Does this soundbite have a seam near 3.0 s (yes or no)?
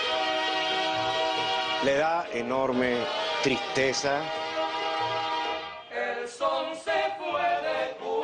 yes